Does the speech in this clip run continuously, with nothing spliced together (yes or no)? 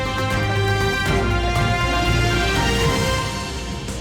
yes